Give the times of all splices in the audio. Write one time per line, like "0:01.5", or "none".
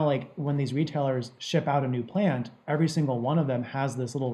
none